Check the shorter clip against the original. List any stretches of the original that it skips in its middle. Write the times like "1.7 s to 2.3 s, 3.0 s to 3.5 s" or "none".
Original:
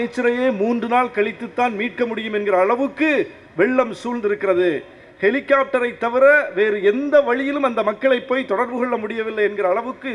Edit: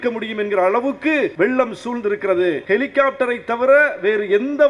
3.3 s to 3.5 s, 4.8 s to 5.1 s